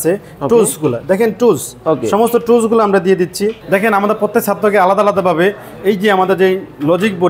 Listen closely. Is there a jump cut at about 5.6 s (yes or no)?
no